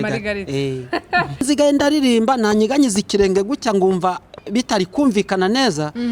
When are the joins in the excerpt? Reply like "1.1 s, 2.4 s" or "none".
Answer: 1.4 s